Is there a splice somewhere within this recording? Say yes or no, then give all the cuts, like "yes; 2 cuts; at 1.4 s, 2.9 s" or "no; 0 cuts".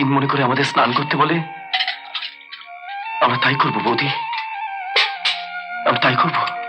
no; 0 cuts